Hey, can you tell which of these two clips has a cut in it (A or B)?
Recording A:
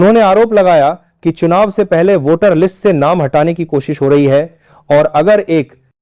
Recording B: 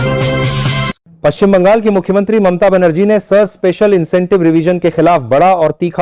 B